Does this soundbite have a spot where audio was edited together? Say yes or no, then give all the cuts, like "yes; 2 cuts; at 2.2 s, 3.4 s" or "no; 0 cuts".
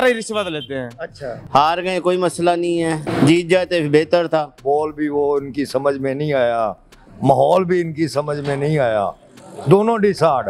yes; 2 cuts; at 1.4 s, 4.6 s